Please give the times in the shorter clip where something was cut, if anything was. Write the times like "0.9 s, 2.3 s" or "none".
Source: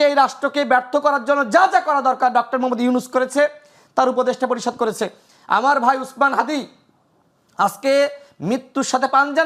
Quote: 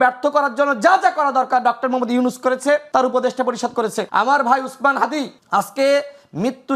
2.9 s, 4.0 s, 5.4 s

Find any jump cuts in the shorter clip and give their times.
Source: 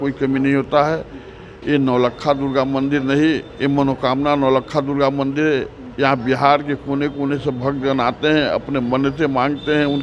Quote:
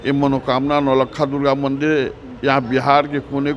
none

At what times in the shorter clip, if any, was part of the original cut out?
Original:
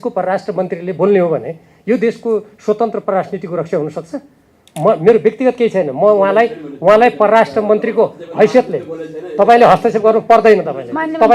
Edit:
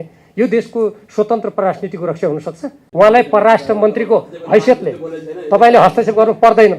2.8 s

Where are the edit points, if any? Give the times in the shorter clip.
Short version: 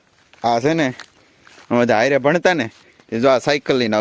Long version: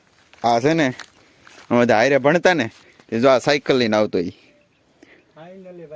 none

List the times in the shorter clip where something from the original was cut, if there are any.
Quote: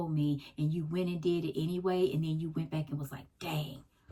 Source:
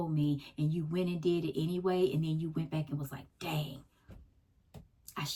none

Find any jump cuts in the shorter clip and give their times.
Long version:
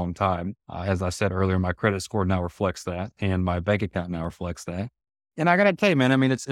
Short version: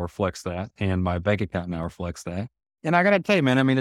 2.6 s

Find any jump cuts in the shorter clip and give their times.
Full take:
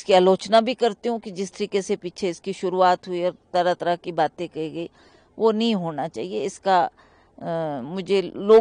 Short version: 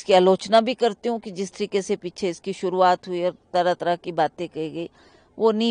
none

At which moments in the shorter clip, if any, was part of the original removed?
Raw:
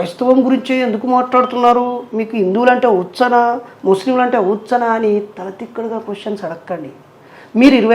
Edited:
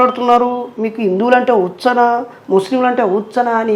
none

